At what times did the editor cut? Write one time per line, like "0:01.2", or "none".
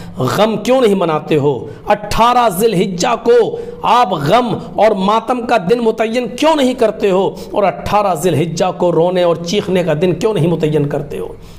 none